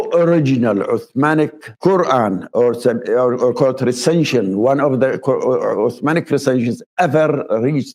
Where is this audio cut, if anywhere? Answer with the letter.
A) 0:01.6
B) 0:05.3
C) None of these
A